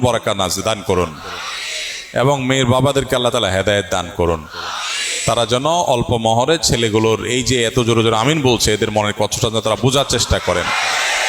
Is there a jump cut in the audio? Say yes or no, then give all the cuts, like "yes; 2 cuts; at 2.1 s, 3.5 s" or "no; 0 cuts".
no; 0 cuts